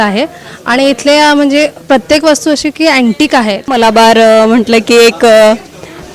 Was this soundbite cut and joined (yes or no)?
yes